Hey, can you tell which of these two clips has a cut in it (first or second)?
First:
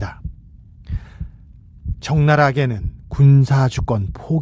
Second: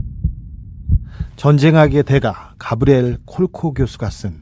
second